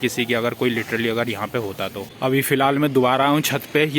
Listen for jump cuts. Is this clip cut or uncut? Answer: uncut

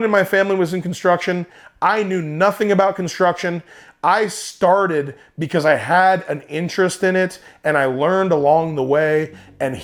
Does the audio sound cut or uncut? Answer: uncut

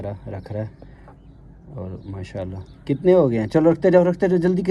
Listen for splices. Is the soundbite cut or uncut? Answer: uncut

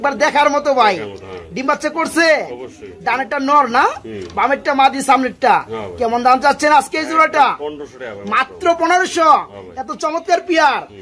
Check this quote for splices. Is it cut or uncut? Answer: uncut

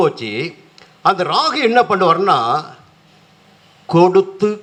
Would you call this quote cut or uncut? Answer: uncut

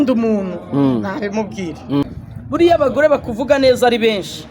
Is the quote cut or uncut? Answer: cut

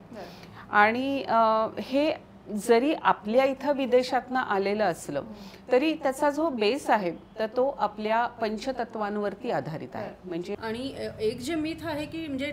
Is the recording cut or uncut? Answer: cut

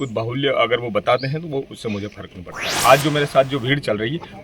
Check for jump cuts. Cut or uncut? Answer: cut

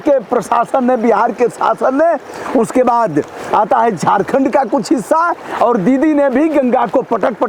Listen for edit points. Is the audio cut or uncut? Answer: uncut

